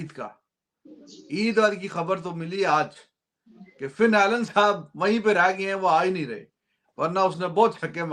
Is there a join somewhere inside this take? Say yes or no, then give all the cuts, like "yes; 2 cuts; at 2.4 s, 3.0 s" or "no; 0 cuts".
no; 0 cuts